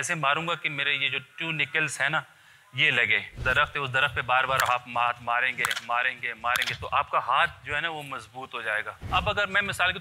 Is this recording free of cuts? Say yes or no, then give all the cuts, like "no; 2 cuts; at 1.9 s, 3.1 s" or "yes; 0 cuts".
no; 2 cuts; at 3.3 s, 9.0 s